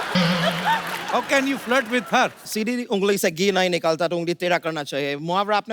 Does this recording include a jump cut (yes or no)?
yes